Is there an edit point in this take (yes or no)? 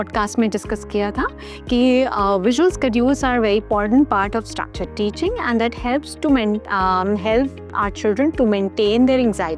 no